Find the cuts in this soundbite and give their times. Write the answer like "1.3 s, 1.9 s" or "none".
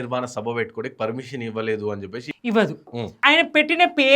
2.2 s, 3.0 s